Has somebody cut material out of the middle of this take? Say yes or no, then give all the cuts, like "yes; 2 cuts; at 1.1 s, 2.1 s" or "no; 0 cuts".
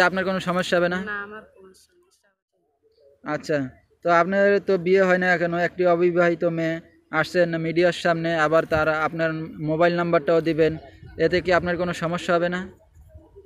yes; 1 cut; at 2.3 s